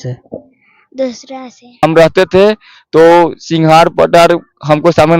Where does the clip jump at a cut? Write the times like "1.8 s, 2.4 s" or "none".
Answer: 1.8 s